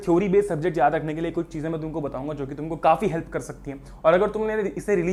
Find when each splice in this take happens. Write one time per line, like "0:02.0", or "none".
none